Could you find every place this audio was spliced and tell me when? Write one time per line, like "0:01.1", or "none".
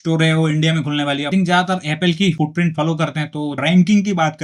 0:01.3
0:02.4
0:03.6